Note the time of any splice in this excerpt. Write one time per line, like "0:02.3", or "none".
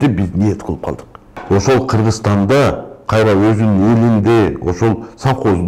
0:01.3